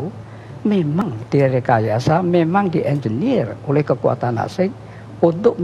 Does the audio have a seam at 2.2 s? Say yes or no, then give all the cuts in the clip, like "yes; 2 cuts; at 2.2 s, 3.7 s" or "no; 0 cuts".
no; 1 cut; at 1.0 s